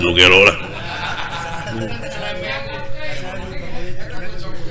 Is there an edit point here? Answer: no; 0 cuts

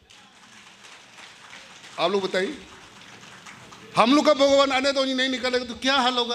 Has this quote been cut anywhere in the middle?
no; 0 cuts

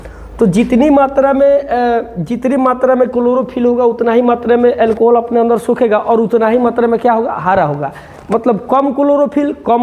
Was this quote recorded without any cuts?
yes; 0 cuts

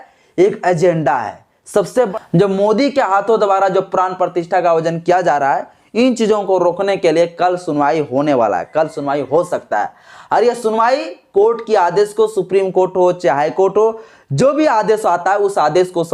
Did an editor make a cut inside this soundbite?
yes; 1 cut; at 2.1 s

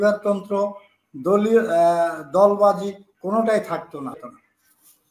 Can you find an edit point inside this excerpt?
yes; 1 cut; at 4.2 s

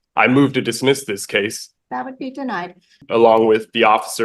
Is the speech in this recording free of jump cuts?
no; 2 cuts; at 1.6 s, 3.0 s

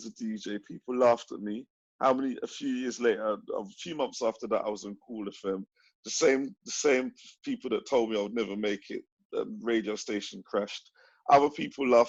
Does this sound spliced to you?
no; 0 cuts

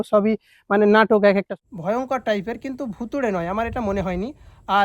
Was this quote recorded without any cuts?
no; 1 cut; at 1.5 s

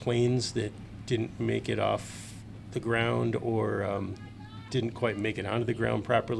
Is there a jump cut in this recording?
no; 0 cuts

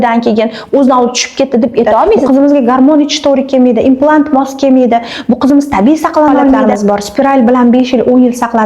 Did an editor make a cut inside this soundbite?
yes; 2 cuts; at 2.2 s, 6.7 s

